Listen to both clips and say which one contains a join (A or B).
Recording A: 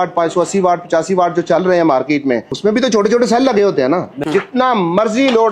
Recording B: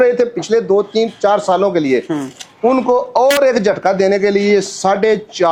A